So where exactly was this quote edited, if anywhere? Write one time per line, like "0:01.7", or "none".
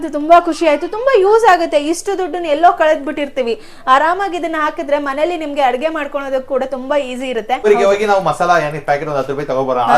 0:07.6